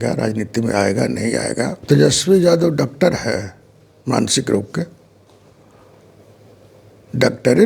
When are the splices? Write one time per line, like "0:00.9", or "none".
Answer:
0:01.8